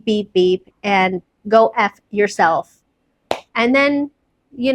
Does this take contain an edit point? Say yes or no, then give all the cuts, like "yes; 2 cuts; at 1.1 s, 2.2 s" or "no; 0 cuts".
no; 0 cuts